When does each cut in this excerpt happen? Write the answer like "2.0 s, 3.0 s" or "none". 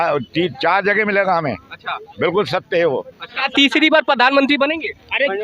3.4 s